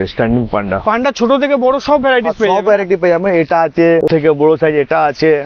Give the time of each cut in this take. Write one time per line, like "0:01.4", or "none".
none